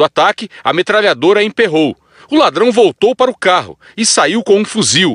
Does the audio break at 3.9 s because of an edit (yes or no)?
no